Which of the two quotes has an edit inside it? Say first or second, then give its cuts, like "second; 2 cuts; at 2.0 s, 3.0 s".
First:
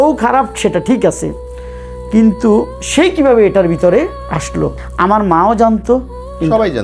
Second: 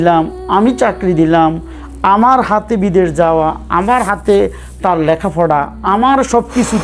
first; 1 cut; at 4.8 s